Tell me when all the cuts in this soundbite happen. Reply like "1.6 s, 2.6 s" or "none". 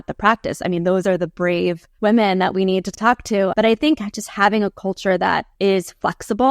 1.9 s, 2.9 s, 5.5 s